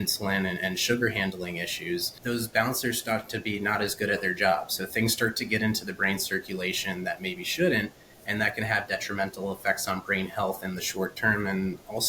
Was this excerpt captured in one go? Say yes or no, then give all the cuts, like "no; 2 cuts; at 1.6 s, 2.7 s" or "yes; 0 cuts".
yes; 0 cuts